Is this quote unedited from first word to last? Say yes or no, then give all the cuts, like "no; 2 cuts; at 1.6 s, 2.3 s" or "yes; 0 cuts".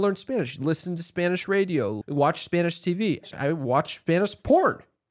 no; 2 cuts; at 2.0 s, 3.2 s